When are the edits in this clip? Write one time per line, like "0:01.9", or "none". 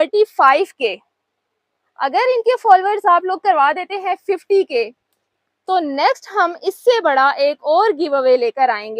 none